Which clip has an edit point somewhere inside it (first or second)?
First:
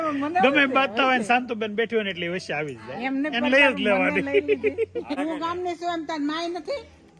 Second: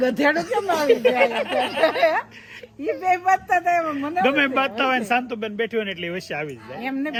first